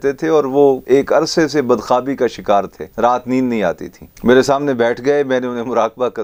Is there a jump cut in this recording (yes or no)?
yes